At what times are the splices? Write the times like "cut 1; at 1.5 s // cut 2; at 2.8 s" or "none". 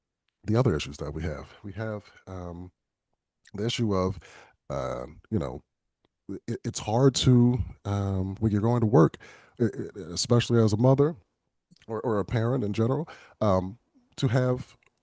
cut 1; at 7.7 s